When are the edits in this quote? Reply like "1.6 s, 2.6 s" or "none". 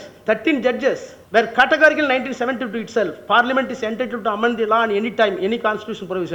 1.1 s